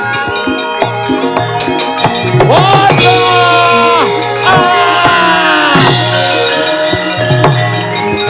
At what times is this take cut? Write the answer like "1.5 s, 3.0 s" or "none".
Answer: none